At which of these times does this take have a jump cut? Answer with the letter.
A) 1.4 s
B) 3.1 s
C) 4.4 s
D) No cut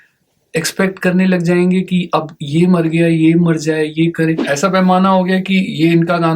C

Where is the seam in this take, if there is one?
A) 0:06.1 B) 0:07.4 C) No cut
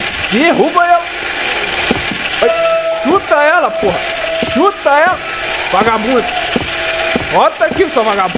C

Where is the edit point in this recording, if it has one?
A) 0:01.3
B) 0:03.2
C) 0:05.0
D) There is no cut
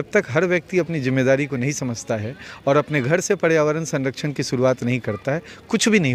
D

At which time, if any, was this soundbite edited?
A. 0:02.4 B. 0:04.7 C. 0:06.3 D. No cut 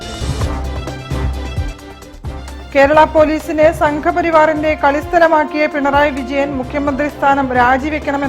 A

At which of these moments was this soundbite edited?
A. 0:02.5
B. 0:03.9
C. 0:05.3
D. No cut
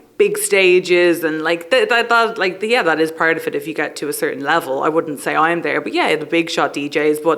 D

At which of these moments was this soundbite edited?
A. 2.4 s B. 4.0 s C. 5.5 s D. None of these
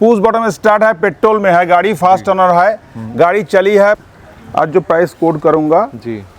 B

